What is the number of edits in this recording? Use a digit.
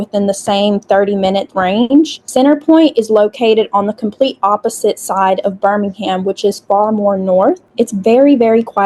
2